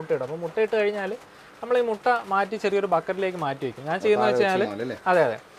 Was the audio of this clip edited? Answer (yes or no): no